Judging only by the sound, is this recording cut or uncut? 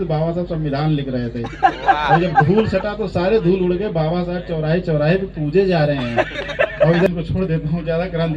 cut